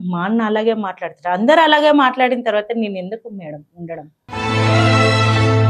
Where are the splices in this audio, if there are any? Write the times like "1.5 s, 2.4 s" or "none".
none